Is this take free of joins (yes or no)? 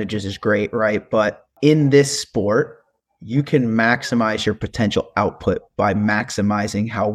no